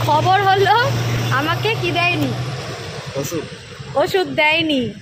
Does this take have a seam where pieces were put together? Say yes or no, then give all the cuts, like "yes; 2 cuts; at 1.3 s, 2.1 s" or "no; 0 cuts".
no; 0 cuts